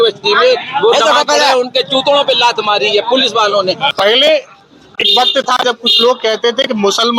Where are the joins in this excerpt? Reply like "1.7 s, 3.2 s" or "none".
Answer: 3.9 s